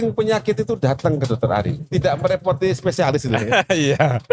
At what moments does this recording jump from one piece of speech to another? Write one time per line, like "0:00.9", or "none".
0:01.8